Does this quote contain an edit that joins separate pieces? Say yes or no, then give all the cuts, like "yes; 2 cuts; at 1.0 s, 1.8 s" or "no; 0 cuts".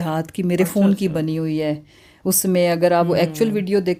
no; 0 cuts